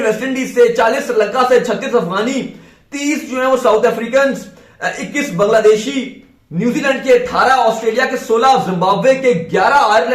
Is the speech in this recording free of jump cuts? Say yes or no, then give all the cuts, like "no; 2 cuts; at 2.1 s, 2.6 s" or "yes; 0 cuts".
yes; 0 cuts